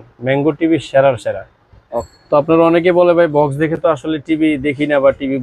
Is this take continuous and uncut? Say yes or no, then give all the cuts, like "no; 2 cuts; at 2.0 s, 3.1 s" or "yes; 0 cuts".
yes; 0 cuts